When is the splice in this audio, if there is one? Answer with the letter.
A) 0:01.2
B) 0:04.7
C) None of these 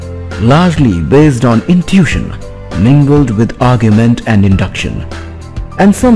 C